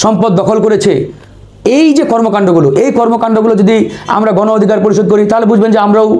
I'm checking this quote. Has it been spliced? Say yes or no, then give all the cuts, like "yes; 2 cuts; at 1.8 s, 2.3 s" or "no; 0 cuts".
no; 0 cuts